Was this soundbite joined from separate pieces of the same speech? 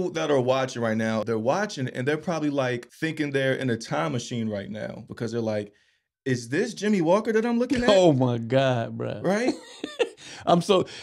yes; 3 cuts; at 1.2 s, 2.9 s, 5.0 s

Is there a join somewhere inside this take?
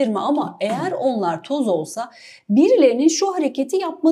no; 0 cuts

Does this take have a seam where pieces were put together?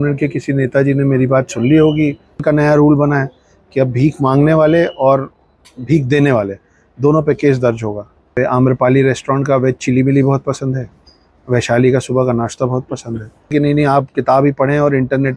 yes; 3 cuts; at 2.4 s, 8.3 s, 13.5 s

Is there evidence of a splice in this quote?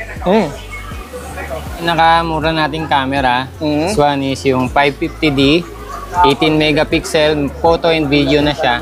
yes; 1 cut; at 1.8 s

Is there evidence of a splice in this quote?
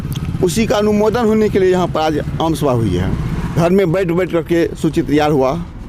yes; 1 cut; at 3.6 s

